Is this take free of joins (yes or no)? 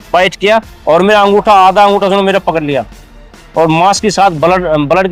yes